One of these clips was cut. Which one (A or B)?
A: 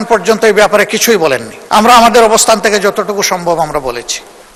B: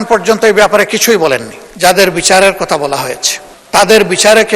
B